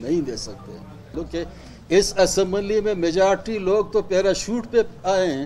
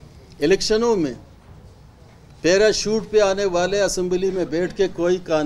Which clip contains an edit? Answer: first; 1 cut; at 1.1 s

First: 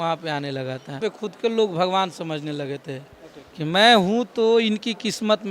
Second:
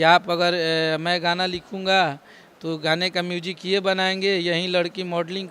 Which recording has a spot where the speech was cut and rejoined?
first; 1 cut; at 1.0 s

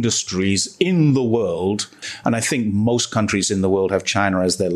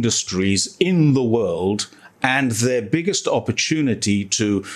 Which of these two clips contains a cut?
first; 1 cut; at 2.0 s

